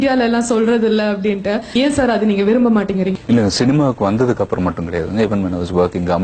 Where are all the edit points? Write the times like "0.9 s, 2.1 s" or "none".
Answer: 1.8 s, 3.2 s